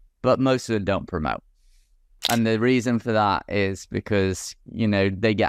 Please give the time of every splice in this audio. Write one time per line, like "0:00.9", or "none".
0:02.2